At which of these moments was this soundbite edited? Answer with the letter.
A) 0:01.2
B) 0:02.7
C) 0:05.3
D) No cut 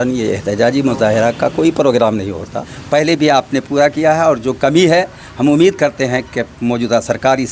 B